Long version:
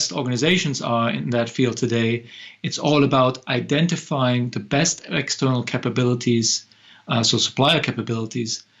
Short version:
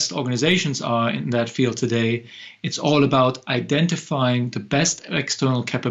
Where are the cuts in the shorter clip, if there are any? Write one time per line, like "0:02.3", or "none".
none